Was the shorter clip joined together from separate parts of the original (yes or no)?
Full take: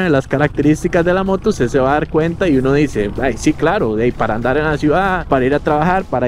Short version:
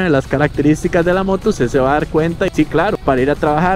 yes